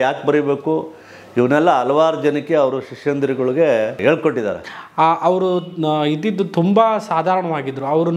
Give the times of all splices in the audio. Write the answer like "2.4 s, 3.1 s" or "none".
4.6 s